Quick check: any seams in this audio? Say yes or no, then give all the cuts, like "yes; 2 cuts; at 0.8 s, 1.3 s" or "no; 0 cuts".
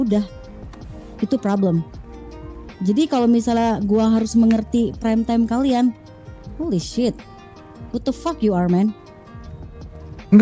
no; 0 cuts